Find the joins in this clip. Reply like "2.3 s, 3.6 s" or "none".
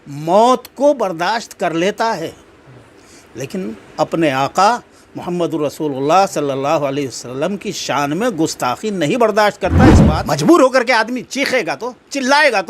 10.0 s